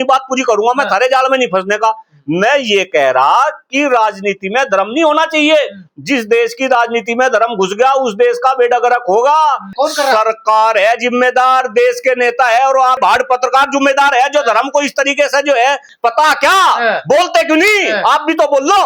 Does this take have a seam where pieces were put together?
yes; 2 cuts; at 9.7 s, 15.9 s

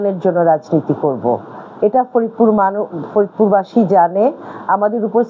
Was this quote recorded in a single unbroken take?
yes; 0 cuts

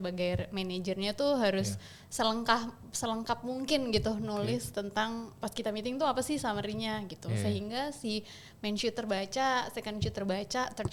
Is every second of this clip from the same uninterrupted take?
yes; 0 cuts

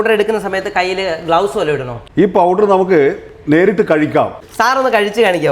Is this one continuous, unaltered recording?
no; 2 cuts; at 2.0 s, 4.4 s

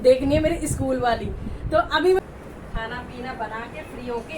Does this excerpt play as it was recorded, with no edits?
no; 1 cut; at 2.2 s

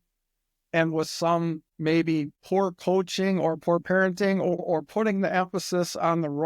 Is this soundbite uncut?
no; 3 cuts; at 1.7 s, 2.4 s, 4.6 s

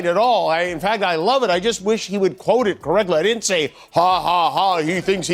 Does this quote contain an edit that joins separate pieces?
no; 0 cuts

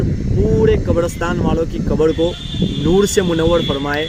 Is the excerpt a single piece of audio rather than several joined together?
yes; 0 cuts

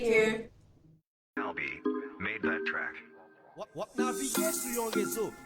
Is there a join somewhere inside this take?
yes; 1 cut; at 1.4 s

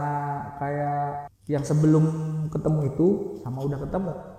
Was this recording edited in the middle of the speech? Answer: yes; 1 cut; at 1.3 s

